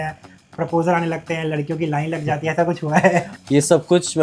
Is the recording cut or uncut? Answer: cut